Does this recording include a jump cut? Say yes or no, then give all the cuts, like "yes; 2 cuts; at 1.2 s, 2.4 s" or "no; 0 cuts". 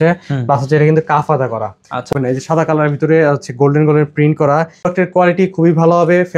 yes; 2 cuts; at 2.1 s, 4.9 s